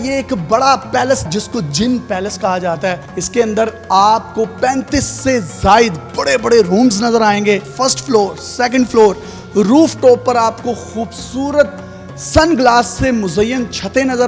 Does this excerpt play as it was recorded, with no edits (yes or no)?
no